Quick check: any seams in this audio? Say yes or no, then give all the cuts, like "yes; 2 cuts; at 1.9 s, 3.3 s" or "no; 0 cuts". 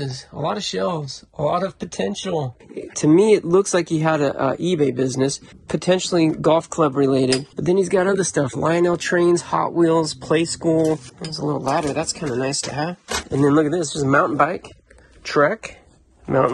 no; 0 cuts